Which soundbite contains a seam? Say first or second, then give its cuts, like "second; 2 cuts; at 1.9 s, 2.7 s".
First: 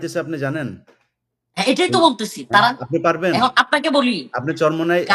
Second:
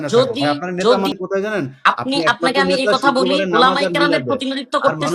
second; 1 cut; at 1.1 s